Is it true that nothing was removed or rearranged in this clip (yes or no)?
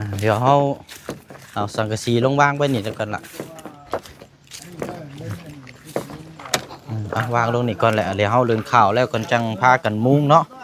yes